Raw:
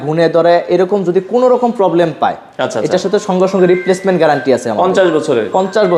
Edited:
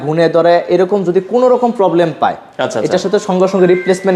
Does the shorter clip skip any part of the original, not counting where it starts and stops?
no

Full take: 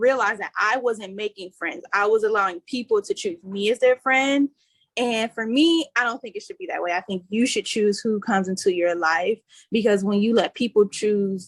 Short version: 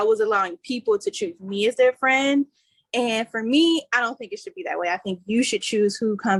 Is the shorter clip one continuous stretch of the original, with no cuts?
yes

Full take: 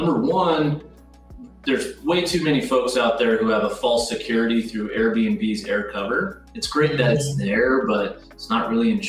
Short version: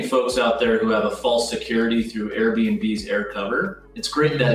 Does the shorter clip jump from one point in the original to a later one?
no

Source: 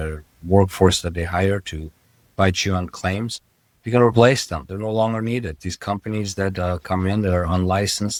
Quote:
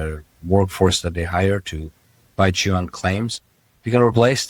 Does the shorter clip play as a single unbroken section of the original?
yes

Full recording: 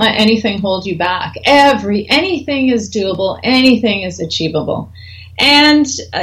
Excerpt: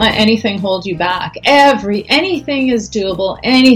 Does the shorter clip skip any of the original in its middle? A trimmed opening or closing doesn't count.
no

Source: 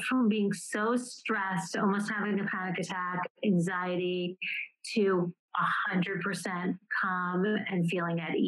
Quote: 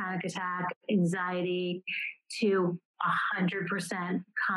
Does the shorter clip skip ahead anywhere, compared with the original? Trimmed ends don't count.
no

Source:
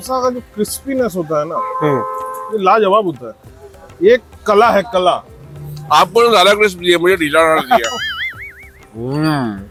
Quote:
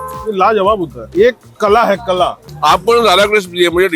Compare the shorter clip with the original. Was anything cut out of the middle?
yes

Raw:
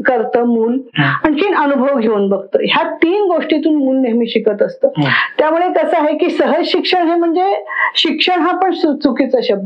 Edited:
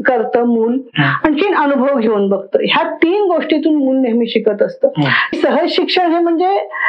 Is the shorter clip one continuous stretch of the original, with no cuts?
no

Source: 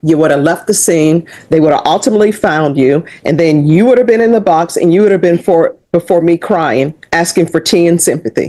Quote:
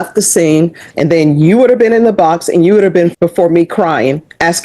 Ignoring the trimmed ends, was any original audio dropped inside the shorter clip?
yes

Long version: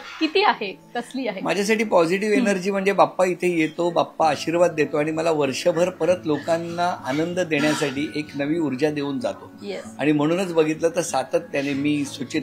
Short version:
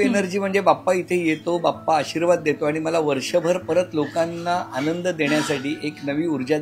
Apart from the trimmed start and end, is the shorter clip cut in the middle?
no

